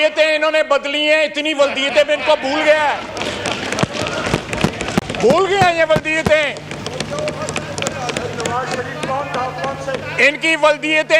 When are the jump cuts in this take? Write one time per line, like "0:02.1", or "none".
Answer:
none